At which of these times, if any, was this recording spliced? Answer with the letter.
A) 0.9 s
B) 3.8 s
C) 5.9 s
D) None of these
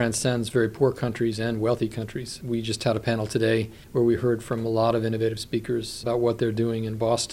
C